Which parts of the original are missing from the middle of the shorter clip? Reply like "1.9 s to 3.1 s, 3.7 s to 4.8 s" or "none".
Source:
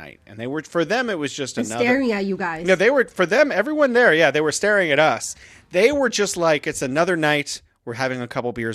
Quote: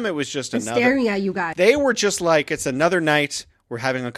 2.5 s to 5.6 s